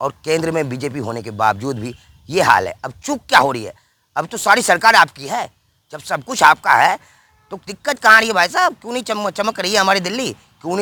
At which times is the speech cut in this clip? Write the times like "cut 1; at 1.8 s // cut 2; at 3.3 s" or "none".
none